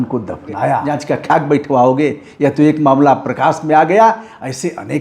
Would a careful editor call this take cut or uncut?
cut